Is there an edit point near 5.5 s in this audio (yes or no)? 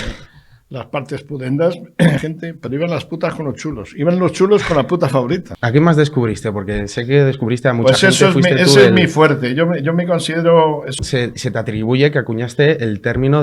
yes